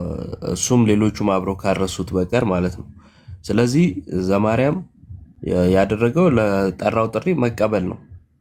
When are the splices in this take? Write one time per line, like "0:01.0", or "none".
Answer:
none